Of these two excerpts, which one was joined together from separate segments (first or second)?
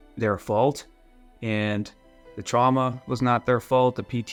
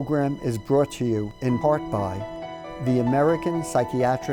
second